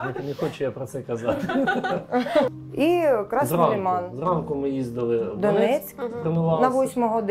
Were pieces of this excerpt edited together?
yes; 1 cut; at 2.5 s

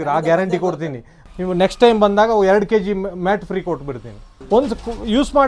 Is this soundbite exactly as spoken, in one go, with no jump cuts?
no; 2 cuts; at 1.1 s, 4.3 s

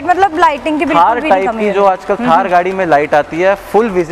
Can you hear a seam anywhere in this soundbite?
no; 0 cuts

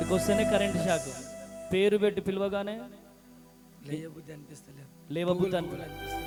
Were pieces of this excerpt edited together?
no; 0 cuts

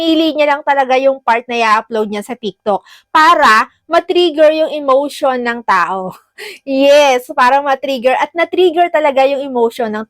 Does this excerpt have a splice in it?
no; 0 cuts

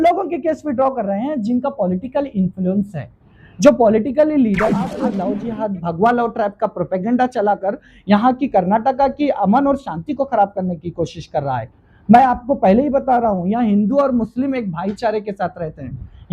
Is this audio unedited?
no; 1 cut; at 5.2 s

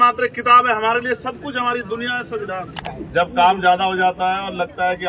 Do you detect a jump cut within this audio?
yes; 1 cut; at 2.8 s

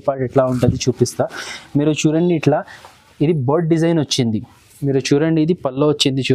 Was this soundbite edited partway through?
yes; 1 cut; at 4.5 s

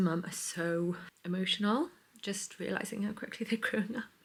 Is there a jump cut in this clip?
no; 0 cuts

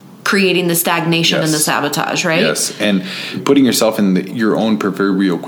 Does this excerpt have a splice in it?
yes; 1 cut; at 4.3 s

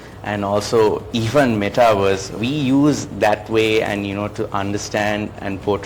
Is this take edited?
yes; 1 cut; at 2.4 s

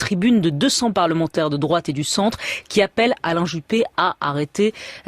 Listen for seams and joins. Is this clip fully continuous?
no; 1 cut; at 2.8 s

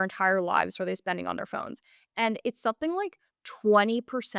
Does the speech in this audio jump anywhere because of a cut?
no; 0 cuts

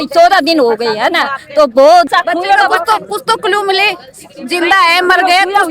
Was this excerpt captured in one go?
no; 1 cut; at 2.1 s

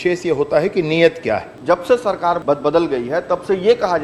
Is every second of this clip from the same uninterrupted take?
no; 2 cuts; at 1.5 s, 2.4 s

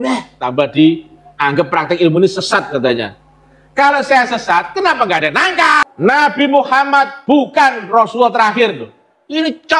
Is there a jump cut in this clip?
yes; 1 cut; at 5.8 s

